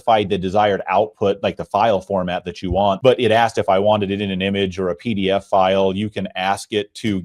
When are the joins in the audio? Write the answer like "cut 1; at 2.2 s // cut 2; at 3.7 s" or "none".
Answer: cut 1; at 3.0 s